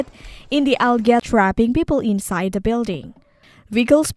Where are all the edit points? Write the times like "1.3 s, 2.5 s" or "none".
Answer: 1.2 s